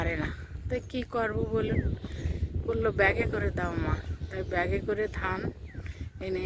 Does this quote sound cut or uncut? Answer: uncut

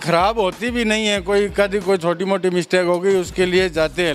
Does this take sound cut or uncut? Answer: uncut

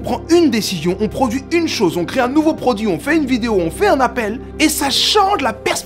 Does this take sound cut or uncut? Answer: uncut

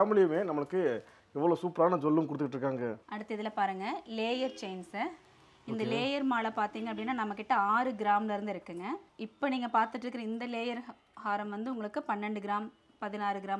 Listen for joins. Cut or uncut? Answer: uncut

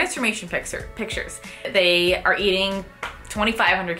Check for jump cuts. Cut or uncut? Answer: cut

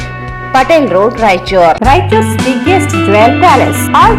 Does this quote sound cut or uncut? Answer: cut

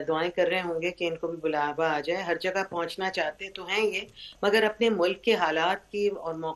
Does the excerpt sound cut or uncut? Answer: uncut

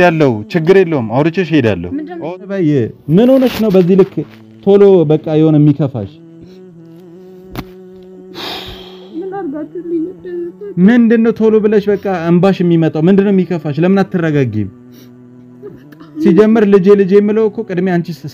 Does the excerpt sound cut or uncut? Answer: cut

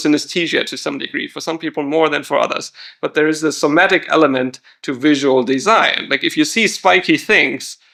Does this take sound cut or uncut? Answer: uncut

